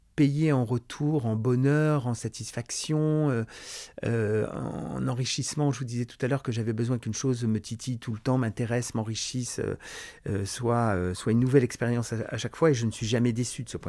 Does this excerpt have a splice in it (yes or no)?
no